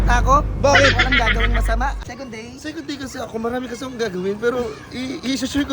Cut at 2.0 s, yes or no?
yes